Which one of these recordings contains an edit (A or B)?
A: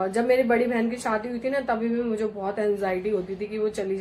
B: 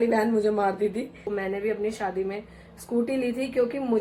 B